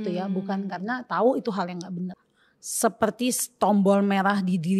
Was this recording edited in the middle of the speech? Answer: yes; 1 cut; at 2.2 s

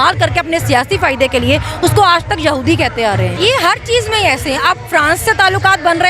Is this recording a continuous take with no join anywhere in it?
no; 1 cut; at 3.3 s

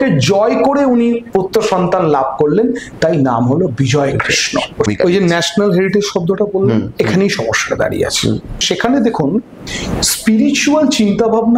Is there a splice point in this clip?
yes; 2 cuts; at 4.9 s, 8.6 s

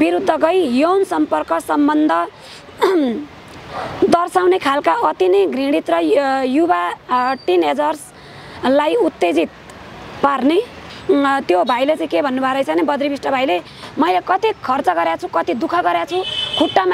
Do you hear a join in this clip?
yes; 1 cut; at 10.9 s

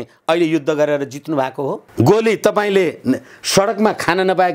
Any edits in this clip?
yes; 1 cut; at 1.9 s

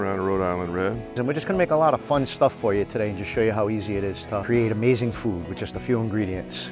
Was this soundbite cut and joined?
yes; 2 cuts; at 1.1 s, 4.4 s

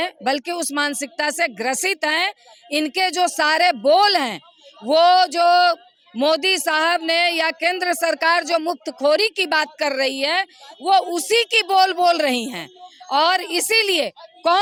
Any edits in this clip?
no; 0 cuts

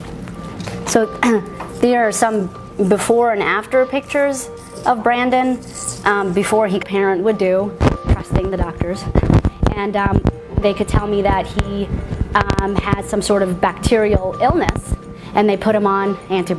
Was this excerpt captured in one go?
yes; 0 cuts

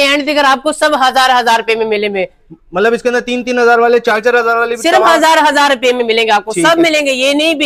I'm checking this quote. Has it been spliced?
no; 0 cuts

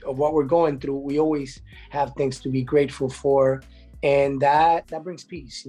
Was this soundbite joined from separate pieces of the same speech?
no; 0 cuts

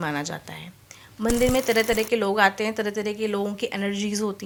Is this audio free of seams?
yes; 0 cuts

